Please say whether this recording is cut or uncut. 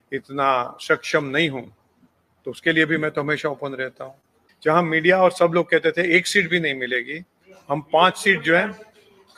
cut